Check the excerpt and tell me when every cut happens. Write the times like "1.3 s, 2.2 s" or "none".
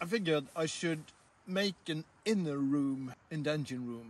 3.2 s

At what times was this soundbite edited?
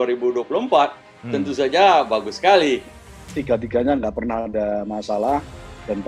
3.0 s

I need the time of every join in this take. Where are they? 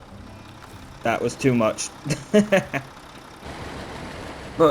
3.4 s

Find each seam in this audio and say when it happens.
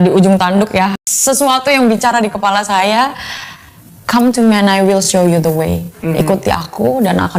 1.0 s

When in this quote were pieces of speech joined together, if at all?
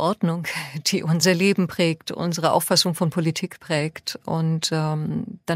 1.2 s, 2.4 s

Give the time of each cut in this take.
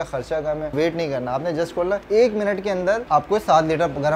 0.7 s, 2.0 s, 3.0 s

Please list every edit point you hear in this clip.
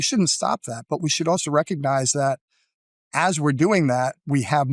none

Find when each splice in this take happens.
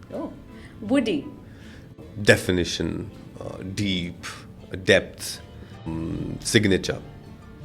2.0 s, 5.8 s

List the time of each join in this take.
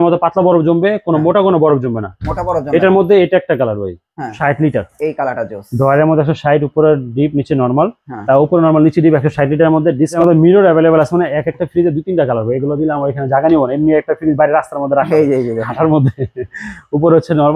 4.3 s, 10.1 s

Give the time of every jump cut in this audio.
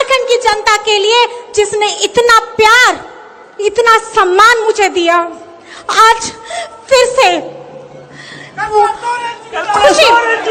none

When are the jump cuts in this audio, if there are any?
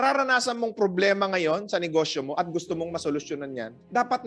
none

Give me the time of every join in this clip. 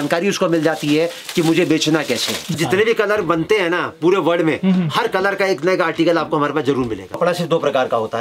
2.5 s, 7.2 s

